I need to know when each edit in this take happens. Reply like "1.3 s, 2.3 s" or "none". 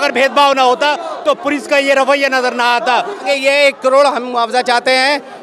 3.2 s